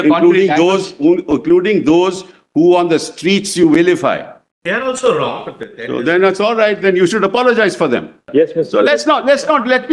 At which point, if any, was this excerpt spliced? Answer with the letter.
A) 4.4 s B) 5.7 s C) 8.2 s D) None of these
C